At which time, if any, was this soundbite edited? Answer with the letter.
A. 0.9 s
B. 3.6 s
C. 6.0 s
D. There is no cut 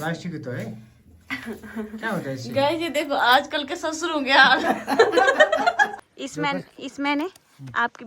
C